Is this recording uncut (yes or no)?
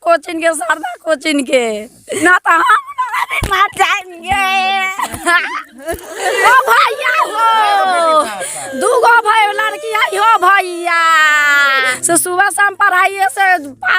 no